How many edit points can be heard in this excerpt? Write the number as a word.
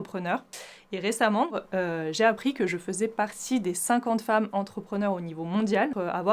zero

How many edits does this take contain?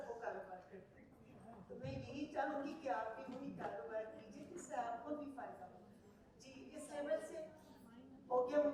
zero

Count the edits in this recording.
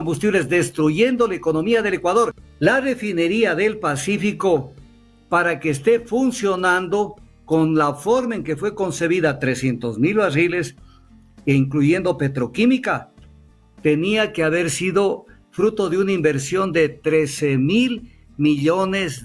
one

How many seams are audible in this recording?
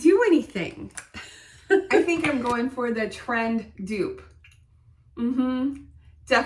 one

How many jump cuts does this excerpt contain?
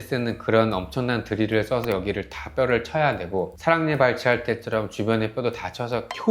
zero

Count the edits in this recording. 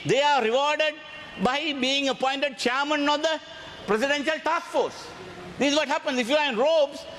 zero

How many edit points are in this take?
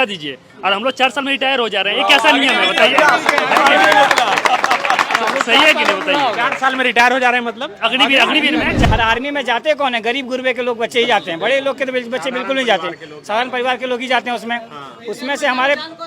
one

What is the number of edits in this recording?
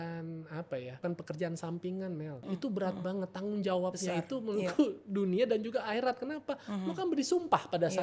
two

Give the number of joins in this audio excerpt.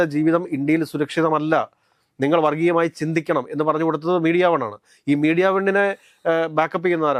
zero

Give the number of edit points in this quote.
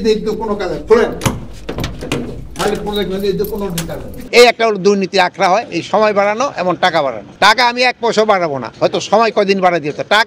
two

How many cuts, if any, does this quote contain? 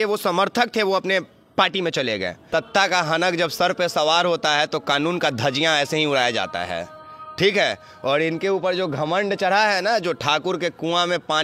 one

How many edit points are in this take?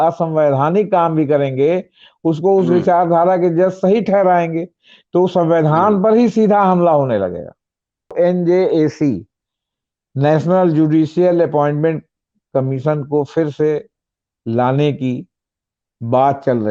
one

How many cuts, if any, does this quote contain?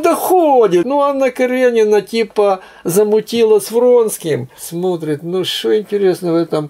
two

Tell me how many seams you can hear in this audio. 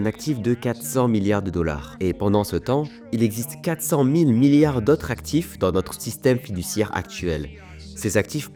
zero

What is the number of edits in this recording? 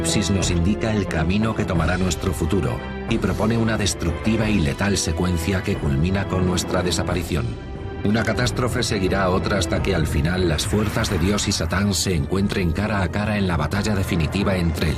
one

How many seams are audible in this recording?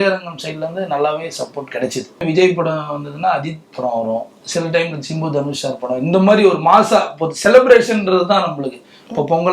one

